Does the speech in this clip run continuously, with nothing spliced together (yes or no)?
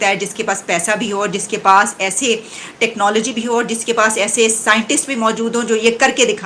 yes